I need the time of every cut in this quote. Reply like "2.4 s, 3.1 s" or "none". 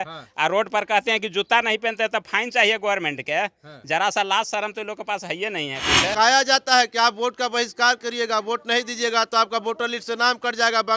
6.1 s